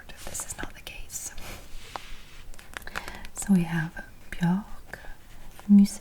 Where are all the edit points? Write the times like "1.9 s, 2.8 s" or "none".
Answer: none